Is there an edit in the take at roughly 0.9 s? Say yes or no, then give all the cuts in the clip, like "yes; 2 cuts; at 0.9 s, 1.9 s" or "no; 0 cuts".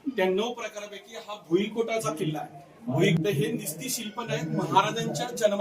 no; 1 cut; at 3.2 s